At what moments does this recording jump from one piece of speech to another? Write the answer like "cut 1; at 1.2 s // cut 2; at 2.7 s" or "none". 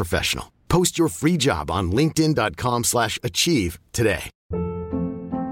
cut 1; at 4.3 s